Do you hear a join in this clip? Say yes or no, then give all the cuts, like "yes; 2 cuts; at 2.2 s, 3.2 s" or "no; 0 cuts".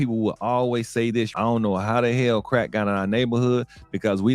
yes; 1 cut; at 1.3 s